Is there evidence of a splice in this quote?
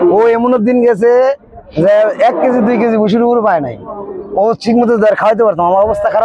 no; 0 cuts

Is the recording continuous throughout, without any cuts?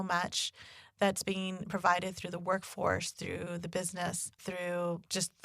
no; 1 cut; at 4.3 s

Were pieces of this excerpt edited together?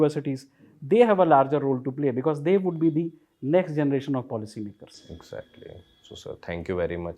no; 0 cuts

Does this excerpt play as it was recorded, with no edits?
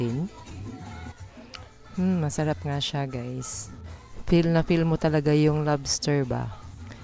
yes; 0 cuts

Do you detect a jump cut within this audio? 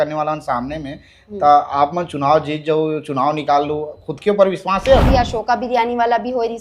yes; 1 cut; at 5.1 s

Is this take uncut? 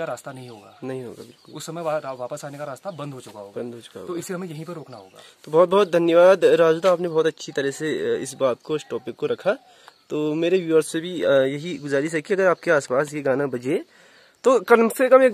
yes; 0 cuts

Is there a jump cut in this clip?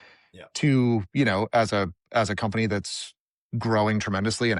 no; 0 cuts

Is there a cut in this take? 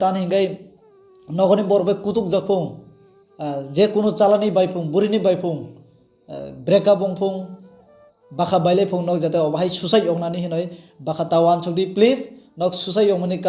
no; 0 cuts

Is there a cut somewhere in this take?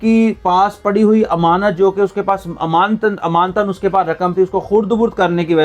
no; 0 cuts

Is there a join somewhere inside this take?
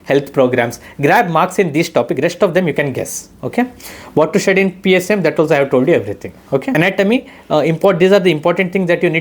yes; 1 cut; at 6.7 s

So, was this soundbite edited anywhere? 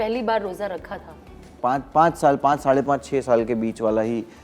no; 0 cuts

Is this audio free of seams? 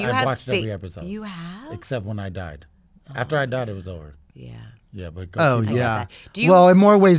yes; 0 cuts

